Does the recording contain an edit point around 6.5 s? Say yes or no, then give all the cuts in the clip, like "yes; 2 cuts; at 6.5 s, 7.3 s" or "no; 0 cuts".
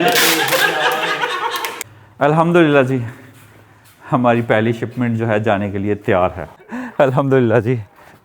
yes; 2 cuts; at 1.8 s, 6.5 s